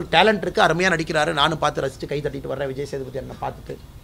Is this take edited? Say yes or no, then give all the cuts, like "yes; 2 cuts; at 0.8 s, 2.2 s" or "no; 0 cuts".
no; 0 cuts